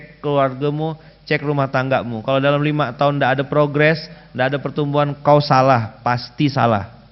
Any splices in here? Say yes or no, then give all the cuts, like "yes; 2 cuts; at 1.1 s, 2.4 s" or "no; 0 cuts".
no; 0 cuts